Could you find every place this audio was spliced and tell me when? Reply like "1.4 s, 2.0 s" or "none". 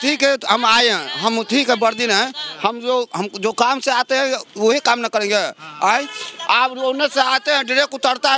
none

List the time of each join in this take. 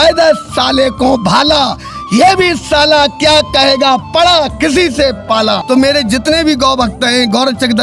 5.6 s

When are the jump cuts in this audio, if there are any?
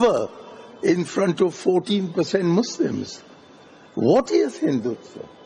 none

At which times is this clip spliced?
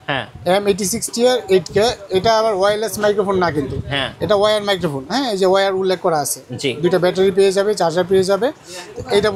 none

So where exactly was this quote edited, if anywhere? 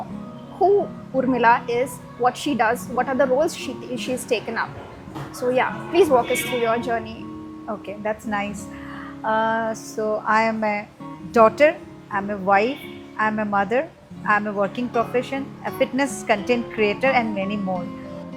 none

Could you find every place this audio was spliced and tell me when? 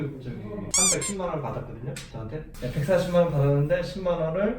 2.5 s

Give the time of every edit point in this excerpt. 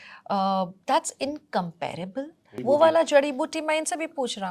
2.5 s

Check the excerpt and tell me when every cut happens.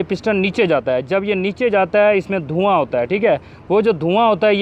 none

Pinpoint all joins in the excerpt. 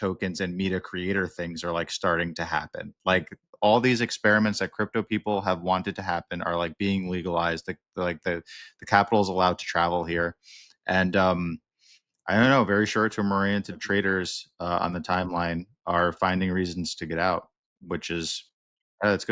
13.8 s

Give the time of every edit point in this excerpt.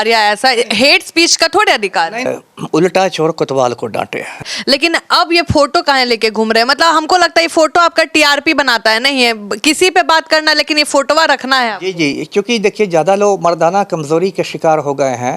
2.2 s, 4.3 s

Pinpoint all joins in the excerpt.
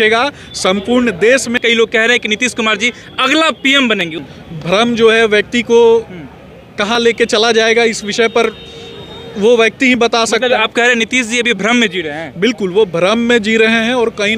1.6 s, 4.2 s

